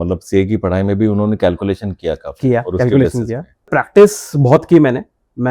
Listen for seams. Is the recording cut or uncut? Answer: cut